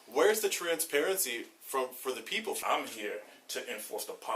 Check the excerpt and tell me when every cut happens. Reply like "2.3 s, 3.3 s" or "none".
2.6 s